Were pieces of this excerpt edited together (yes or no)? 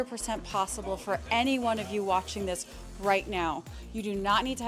no